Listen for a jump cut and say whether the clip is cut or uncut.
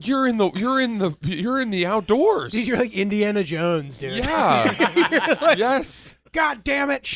uncut